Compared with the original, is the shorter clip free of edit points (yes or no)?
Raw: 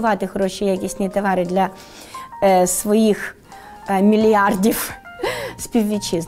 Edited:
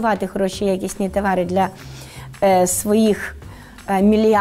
yes